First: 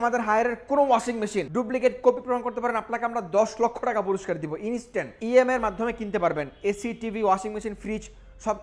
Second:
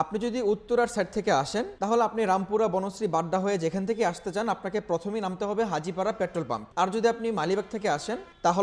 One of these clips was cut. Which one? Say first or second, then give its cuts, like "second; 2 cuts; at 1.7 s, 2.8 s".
first; 2 cuts; at 1.5 s, 5.1 s